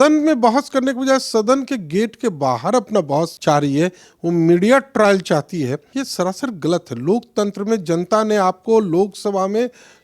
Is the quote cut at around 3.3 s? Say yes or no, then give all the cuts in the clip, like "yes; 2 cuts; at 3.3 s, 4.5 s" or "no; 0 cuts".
yes; 2 cuts; at 3.3 s, 5.8 s